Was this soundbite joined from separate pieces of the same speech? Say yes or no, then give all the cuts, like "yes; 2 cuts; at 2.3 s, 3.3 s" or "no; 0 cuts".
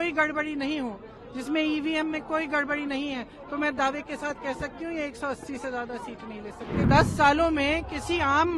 yes; 1 cut; at 6.9 s